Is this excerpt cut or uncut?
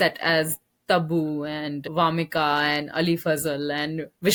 uncut